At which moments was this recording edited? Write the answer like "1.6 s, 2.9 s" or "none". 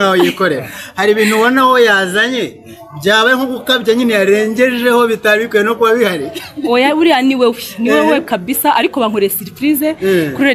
none